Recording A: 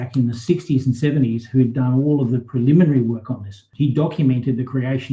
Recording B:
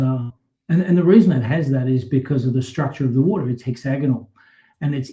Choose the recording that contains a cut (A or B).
A